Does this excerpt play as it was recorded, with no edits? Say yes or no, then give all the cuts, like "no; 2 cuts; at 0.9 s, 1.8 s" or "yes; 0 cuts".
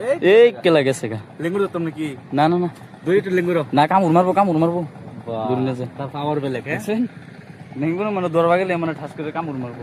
yes; 0 cuts